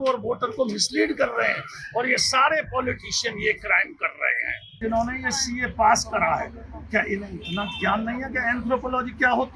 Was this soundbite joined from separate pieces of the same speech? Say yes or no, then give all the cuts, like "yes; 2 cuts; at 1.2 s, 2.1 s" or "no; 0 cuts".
yes; 1 cut; at 4.8 s